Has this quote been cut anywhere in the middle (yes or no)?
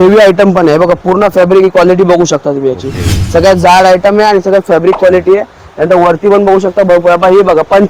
no